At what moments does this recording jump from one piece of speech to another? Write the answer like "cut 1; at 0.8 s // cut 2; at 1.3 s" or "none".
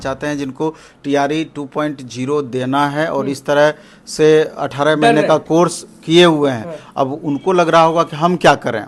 none

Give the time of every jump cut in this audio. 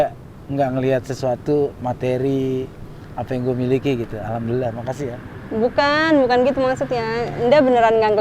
none

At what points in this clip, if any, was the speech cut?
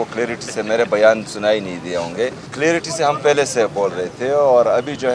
cut 1; at 2.4 s

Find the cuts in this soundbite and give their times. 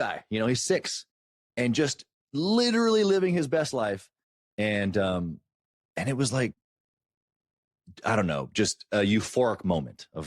none

